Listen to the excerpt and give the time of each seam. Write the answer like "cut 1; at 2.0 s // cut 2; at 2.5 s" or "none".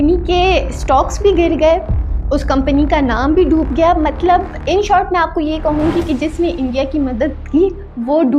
none